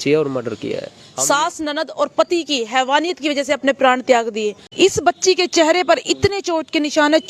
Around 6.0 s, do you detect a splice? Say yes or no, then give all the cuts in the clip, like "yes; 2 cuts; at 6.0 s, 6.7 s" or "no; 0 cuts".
no; 2 cuts; at 1.0 s, 4.6 s